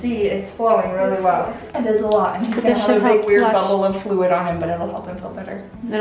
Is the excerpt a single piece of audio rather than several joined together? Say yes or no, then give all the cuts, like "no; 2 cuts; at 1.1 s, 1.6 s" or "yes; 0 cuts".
no; 1 cut; at 1.6 s